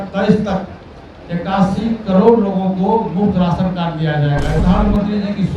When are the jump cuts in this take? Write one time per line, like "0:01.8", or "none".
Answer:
0:04.6